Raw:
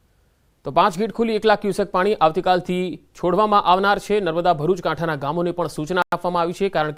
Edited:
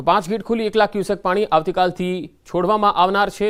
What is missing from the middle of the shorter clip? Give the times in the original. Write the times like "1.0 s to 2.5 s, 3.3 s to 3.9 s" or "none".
none